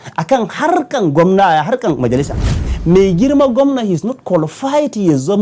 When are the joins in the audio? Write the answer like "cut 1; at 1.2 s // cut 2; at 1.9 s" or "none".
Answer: cut 1; at 2.7 s